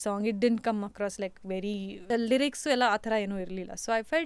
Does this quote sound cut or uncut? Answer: cut